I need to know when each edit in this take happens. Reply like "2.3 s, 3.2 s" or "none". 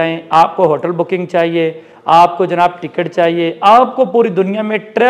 none